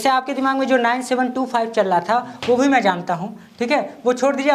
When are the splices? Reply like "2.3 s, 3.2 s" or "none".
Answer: none

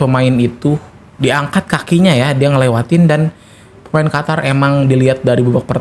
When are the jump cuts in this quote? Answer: none

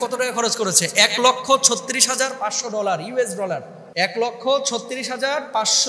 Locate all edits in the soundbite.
3.8 s

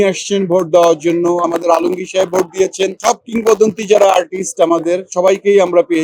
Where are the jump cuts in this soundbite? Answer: 1.5 s, 5.1 s

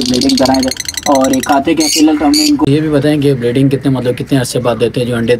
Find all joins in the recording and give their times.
2.6 s

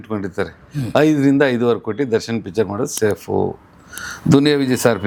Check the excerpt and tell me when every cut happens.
none

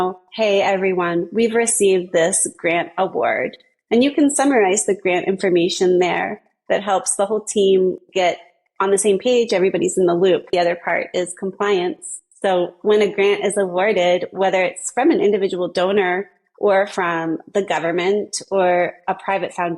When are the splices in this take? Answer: 10.5 s

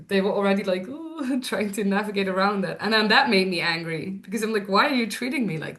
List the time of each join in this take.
none

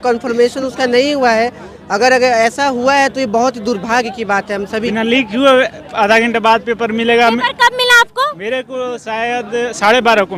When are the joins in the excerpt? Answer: 4.9 s

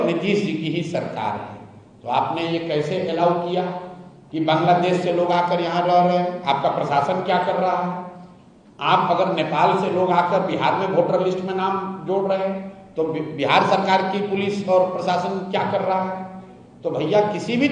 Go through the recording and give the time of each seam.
none

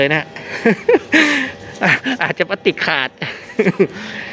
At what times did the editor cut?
none

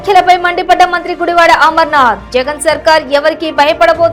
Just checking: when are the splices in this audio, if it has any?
none

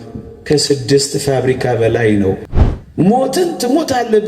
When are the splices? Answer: 2.5 s

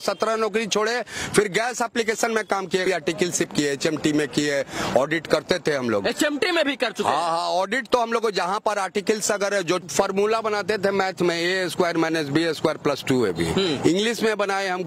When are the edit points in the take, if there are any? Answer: 2.8 s, 9.8 s

